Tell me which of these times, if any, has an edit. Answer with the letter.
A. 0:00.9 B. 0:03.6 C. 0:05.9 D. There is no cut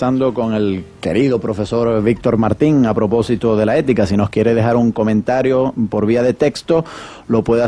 B